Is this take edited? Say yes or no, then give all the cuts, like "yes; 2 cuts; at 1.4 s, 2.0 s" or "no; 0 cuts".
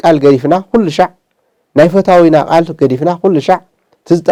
no; 0 cuts